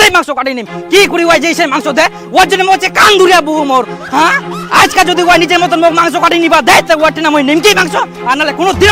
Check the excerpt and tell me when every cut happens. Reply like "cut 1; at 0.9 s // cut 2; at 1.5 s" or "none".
none